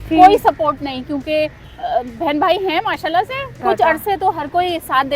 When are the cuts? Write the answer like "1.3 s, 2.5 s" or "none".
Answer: 3.6 s